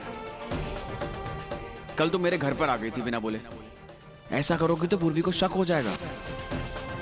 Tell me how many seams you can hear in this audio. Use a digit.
1